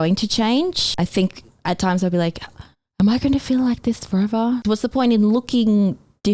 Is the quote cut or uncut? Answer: cut